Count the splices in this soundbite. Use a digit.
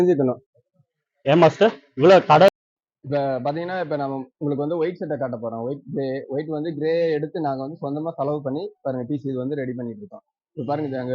1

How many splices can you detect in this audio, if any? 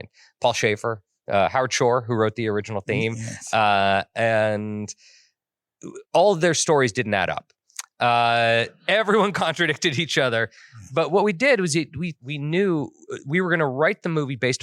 1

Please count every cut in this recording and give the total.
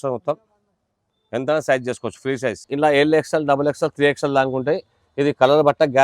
1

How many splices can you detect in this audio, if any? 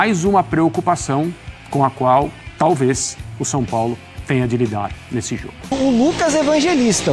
1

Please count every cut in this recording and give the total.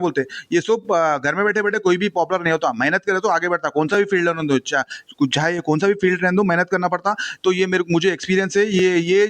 0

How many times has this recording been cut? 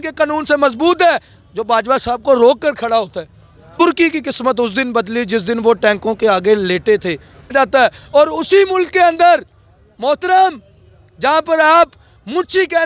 2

